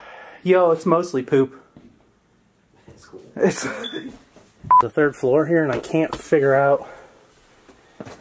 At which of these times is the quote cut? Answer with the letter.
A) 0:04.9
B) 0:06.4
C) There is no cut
A